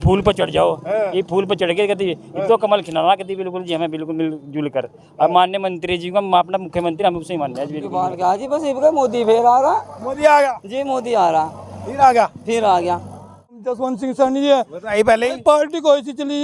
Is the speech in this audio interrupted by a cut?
yes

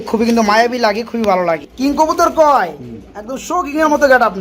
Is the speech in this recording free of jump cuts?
no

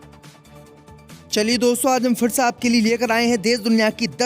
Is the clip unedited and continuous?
no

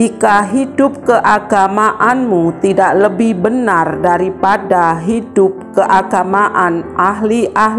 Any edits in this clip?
no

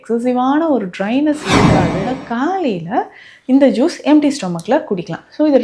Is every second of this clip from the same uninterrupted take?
no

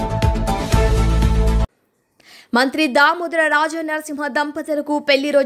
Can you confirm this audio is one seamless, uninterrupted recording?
yes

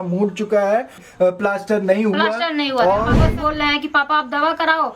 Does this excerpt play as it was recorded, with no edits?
no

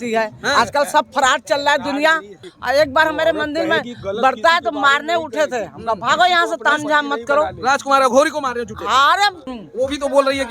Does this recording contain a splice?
yes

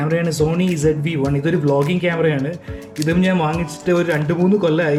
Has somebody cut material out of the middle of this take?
no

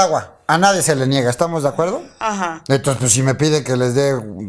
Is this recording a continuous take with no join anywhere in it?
yes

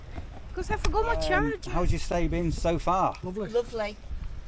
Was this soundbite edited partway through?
yes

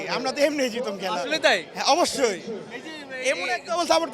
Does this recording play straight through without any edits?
yes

